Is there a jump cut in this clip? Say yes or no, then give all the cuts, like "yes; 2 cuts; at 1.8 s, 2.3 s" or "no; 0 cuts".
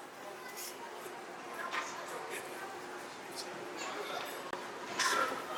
no; 0 cuts